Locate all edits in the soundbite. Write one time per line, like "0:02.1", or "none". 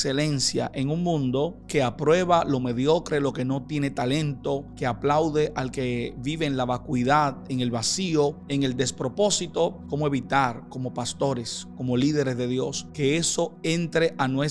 0:01.6
0:04.7
0:08.4
0:09.8
0:12.8